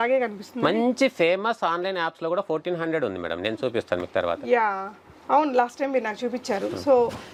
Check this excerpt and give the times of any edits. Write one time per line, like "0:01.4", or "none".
none